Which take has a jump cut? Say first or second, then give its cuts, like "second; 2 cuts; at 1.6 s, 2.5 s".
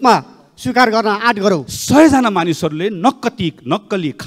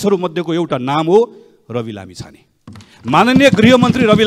first; 1 cut; at 1.7 s